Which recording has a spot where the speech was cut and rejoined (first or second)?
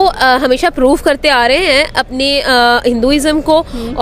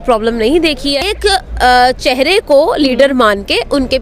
second